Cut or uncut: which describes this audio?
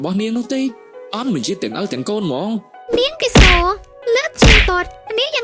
cut